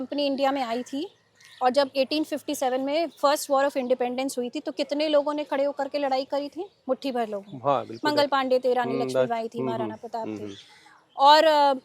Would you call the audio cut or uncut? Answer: uncut